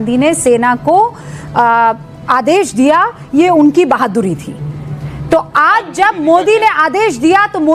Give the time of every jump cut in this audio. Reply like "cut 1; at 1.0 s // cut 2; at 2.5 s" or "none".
none